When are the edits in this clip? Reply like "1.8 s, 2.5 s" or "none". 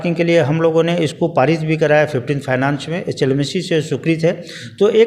none